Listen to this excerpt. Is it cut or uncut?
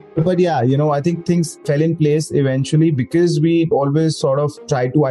cut